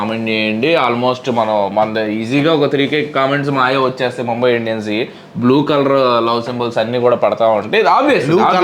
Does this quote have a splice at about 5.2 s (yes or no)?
no